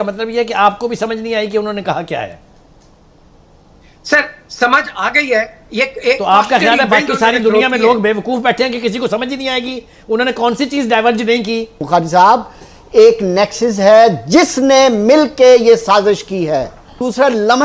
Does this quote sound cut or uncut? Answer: cut